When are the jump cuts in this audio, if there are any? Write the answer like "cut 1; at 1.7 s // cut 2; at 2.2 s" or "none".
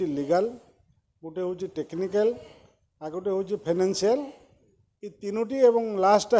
none

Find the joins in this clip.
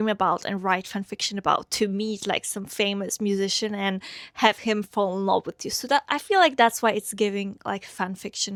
none

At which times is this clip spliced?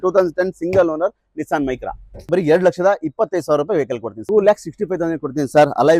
cut 1; at 2.3 s // cut 2; at 4.1 s

